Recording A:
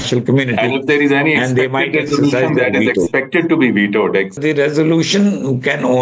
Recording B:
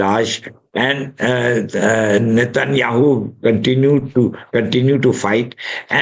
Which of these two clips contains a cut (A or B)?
A